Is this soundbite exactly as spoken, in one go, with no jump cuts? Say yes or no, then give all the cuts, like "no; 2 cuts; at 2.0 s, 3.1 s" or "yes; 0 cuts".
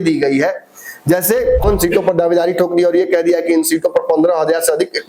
no; 1 cut; at 1.6 s